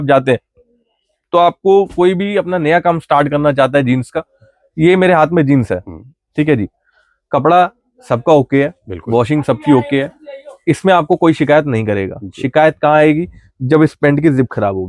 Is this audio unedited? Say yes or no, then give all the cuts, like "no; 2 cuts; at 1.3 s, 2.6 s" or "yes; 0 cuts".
yes; 0 cuts